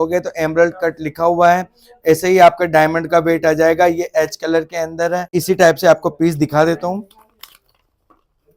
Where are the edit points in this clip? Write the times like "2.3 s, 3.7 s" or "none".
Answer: 5.3 s

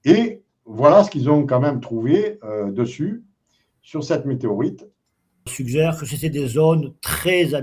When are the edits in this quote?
5.5 s

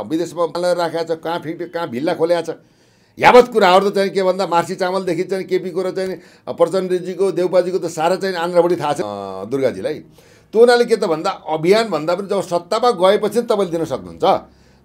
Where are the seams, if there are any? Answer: none

